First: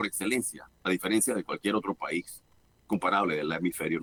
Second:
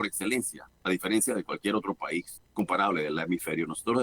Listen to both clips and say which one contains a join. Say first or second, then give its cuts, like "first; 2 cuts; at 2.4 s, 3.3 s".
second; 1 cut; at 2.4 s